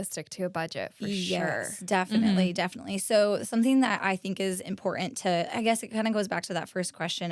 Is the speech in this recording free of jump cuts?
yes; 0 cuts

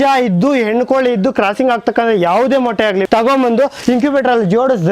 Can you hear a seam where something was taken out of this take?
yes; 1 cut; at 3.0 s

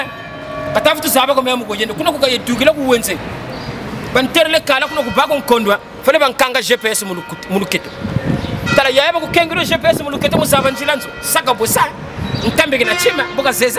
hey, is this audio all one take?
yes; 0 cuts

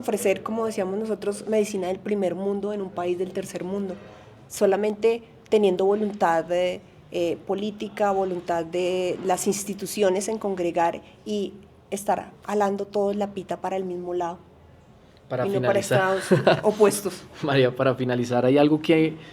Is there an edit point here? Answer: no; 0 cuts

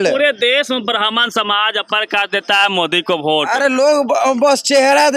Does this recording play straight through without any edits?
yes; 0 cuts

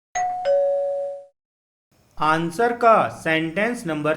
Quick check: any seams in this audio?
yes; 1 cut; at 1.2 s

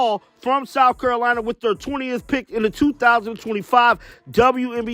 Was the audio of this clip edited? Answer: no; 0 cuts

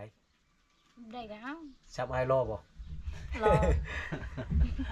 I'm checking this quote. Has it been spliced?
no; 0 cuts

